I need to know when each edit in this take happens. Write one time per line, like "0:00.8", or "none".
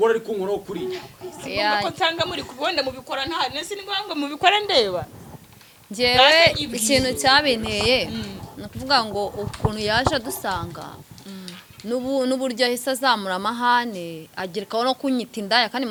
none